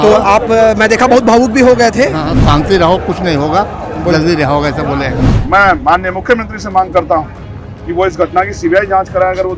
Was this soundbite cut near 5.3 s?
yes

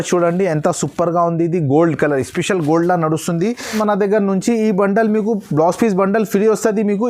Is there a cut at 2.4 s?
no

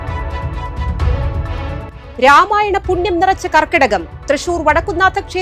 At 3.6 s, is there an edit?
no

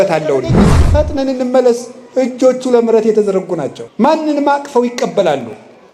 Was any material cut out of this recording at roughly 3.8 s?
yes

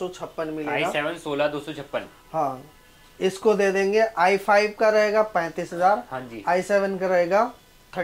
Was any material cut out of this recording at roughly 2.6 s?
no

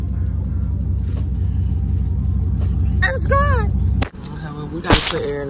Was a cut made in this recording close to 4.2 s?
yes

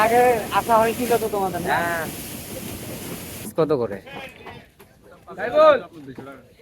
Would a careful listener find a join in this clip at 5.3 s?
no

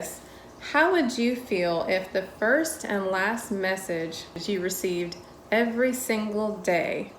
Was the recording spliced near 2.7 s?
no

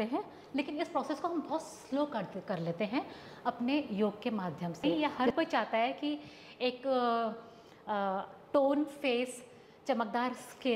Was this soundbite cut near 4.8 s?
yes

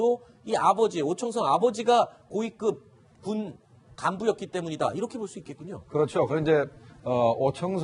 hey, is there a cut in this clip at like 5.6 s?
no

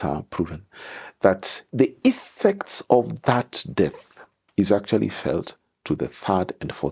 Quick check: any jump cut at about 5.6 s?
no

